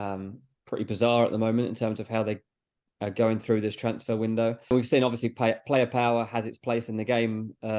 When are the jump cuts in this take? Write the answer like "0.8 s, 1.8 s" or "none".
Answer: 4.7 s